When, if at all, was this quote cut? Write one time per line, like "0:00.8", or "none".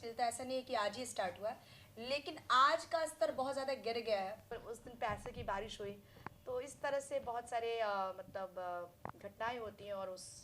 0:04.5